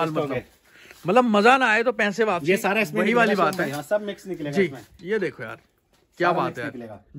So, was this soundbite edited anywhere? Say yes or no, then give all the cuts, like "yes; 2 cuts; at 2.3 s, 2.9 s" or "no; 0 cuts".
no; 0 cuts